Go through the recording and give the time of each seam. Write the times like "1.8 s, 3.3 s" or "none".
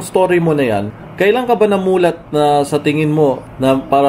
none